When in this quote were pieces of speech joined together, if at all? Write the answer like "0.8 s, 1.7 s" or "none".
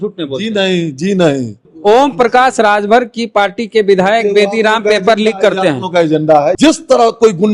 1.7 s, 6.6 s